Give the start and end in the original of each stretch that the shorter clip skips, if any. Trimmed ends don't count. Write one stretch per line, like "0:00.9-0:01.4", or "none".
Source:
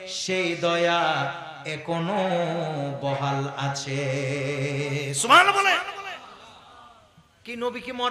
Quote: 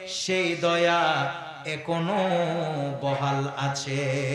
none